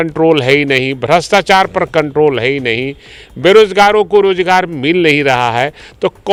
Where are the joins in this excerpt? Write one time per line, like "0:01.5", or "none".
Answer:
none